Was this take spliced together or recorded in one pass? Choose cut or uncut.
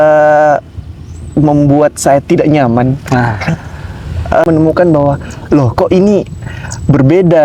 cut